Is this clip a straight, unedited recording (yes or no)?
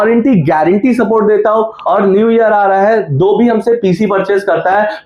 no